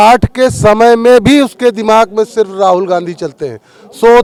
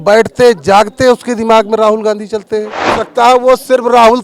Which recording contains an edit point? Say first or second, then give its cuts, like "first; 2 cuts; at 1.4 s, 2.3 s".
second; 1 cut; at 3.0 s